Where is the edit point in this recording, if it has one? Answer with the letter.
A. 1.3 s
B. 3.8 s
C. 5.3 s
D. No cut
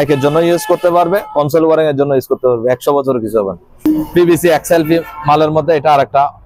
B